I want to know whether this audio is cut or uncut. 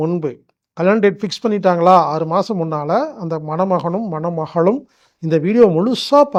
uncut